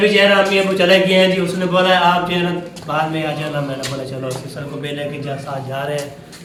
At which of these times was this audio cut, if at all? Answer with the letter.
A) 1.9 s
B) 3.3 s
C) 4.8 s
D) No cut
D